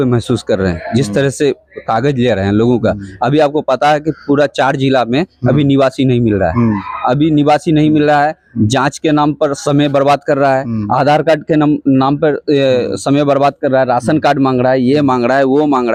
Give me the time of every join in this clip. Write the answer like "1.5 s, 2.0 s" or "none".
none